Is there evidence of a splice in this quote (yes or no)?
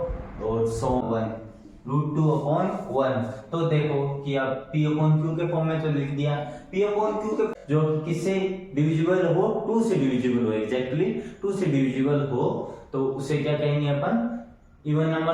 yes